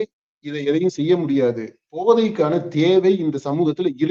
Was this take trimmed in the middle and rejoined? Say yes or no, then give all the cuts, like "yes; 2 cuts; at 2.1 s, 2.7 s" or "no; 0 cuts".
no; 0 cuts